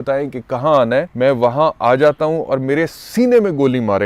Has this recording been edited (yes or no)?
yes